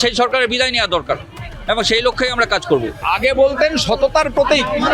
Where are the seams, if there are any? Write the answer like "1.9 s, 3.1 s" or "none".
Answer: 2.9 s